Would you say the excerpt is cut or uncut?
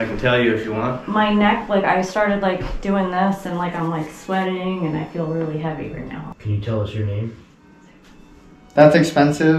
cut